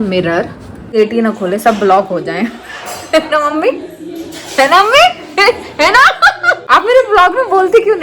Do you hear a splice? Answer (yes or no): yes